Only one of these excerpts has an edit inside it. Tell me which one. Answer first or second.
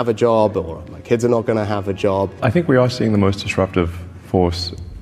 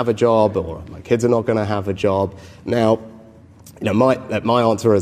first